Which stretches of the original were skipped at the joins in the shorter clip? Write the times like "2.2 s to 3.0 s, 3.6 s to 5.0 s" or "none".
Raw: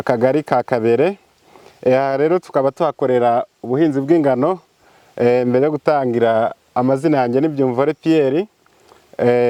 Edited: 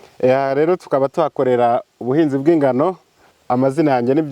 5.0 s to 6.6 s